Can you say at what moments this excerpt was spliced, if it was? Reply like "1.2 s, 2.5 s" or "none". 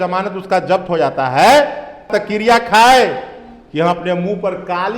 2.1 s

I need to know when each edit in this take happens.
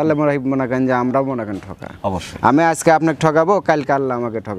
none

